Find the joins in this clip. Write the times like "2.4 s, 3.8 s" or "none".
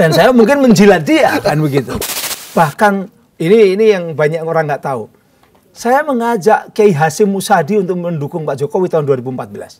1.9 s